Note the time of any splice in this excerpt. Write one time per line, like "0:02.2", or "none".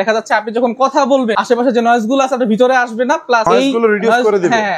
0:01.4
0:03.4